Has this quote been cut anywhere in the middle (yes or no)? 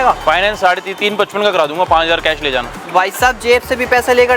no